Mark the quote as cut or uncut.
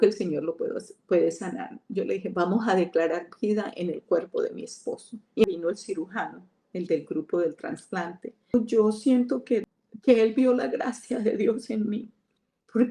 cut